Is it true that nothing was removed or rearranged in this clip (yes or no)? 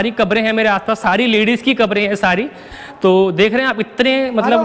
yes